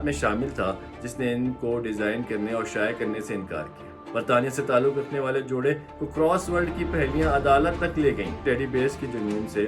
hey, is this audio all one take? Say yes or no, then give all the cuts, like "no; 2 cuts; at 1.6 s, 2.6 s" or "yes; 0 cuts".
no; 2 cuts; at 3.9 s, 8.4 s